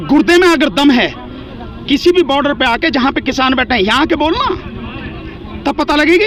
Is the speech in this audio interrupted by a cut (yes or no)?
no